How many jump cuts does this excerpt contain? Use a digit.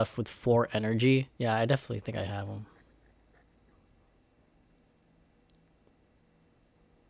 2